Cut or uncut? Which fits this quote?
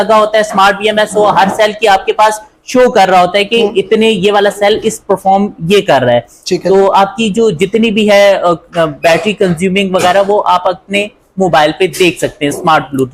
uncut